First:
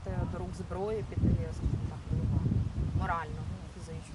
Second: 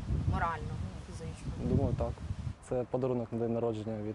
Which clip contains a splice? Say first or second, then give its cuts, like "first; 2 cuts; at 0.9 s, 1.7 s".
second; 1 cut; at 2.5 s